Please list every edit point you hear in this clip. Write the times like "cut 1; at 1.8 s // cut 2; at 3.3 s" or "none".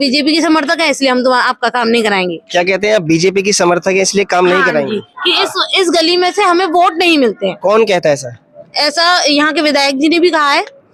none